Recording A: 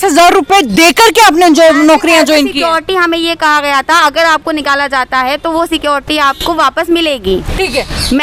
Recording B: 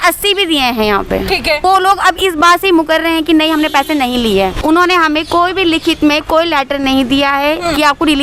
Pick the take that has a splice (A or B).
B